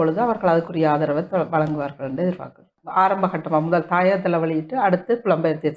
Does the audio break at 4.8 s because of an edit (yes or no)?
no